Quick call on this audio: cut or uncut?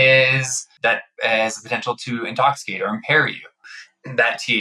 cut